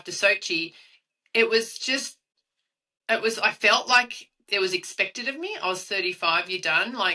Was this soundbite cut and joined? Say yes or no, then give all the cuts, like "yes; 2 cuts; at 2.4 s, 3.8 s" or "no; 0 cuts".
no; 0 cuts